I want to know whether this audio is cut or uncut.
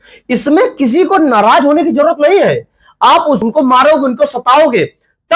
cut